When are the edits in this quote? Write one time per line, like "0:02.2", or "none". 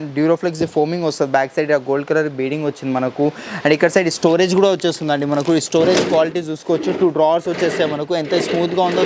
none